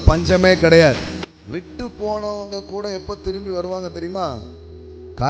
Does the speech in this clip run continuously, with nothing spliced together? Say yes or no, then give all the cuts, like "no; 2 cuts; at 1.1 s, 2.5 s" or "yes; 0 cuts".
no; 1 cut; at 1.2 s